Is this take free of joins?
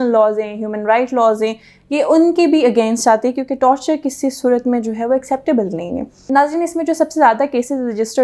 no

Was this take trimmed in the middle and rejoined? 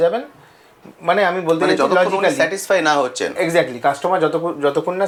no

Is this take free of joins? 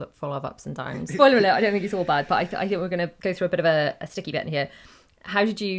no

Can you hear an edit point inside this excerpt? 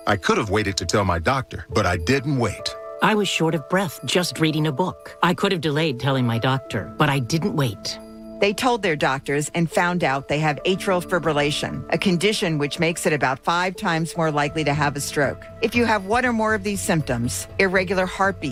no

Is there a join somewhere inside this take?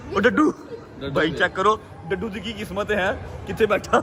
no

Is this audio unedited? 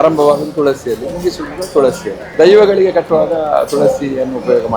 no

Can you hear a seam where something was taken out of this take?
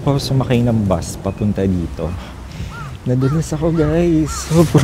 no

